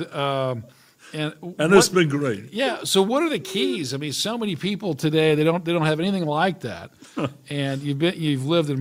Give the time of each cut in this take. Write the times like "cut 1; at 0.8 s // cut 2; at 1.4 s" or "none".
none